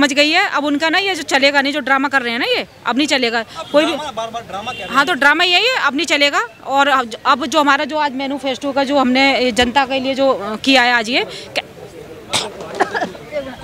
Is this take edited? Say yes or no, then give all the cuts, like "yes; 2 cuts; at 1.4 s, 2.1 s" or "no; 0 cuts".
no; 0 cuts